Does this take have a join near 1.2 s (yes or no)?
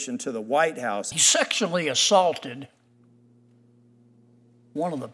yes